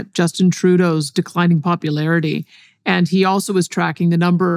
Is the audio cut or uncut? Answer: uncut